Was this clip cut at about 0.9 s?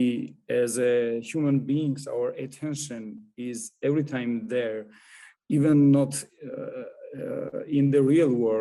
no; 0 cuts

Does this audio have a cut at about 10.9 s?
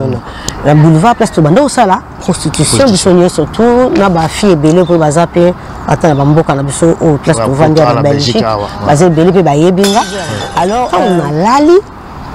yes; 1 cut; at 10.9 s

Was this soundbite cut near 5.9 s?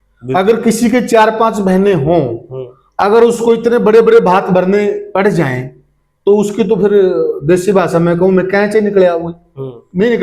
no; 0 cuts

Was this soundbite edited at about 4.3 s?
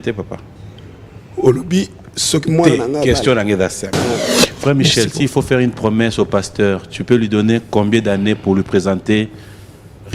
yes; 1 cut; at 4.3 s

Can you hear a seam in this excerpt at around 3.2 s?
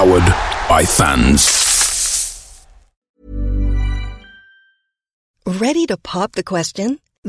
yes; 1 cut; at 3.2 s

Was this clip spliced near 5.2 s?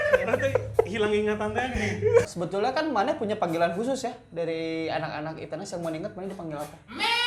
no; 1 cut; at 2.4 s

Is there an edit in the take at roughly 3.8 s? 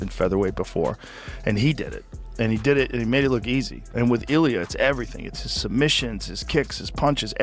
yes; 1 cut; at 3.8 s

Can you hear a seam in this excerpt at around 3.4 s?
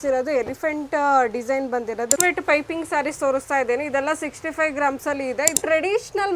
no; 2 cuts; at 2.2 s, 5.6 s

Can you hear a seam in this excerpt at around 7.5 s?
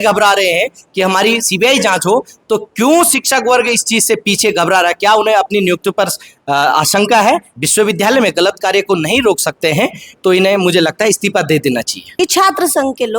yes; 2 cuts; at 7.5 s, 12.0 s

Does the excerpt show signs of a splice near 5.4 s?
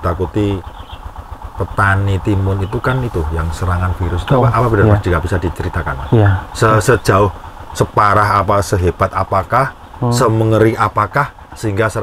no; 0 cuts

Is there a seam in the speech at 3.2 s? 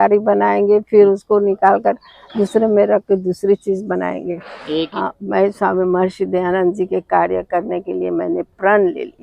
no; 1 cut; at 4.9 s

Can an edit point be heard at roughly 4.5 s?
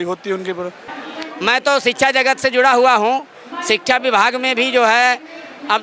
no; 1 cut; at 0.9 s

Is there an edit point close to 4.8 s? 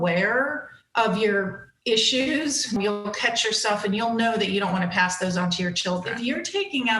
no; 2 cuts; at 2.8 s, 6.1 s

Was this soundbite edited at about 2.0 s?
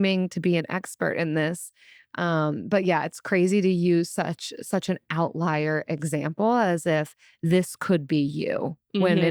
no; 0 cuts

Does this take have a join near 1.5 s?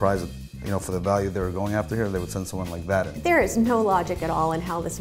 no; 1 cut; at 3.2 s

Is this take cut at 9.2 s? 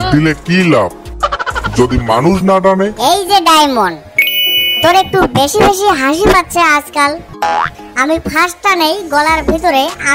no; 2 cuts; at 2.9 s, 7.3 s

